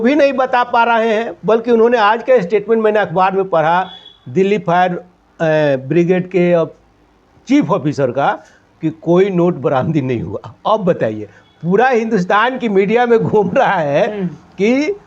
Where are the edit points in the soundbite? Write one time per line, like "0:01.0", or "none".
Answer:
none